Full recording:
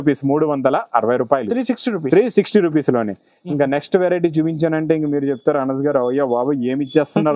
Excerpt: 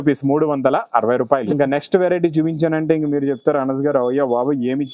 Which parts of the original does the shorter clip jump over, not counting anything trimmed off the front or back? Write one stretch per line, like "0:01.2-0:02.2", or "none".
0:01.5-0:03.5